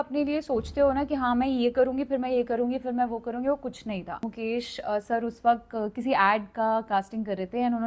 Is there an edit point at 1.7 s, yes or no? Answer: no